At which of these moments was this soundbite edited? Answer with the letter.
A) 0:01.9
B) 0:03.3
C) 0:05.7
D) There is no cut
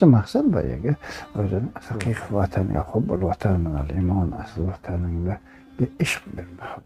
A